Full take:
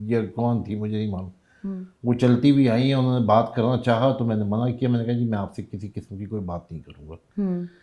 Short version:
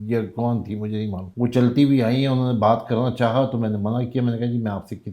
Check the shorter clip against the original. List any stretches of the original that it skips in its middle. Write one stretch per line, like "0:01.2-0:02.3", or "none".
0:01.2-0:01.9